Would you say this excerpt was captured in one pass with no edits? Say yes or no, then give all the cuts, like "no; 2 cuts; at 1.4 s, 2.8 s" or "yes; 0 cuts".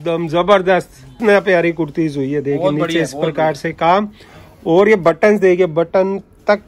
no; 1 cut; at 1.2 s